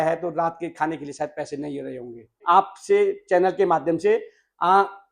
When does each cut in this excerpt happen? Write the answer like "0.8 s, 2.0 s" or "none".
2.4 s